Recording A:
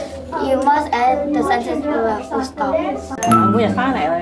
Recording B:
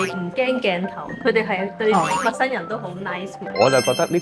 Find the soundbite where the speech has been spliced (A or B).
A